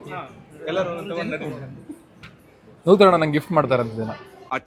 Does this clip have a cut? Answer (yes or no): no